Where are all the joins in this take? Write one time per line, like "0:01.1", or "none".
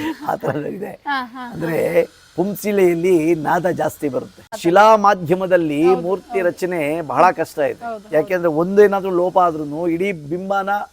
0:04.5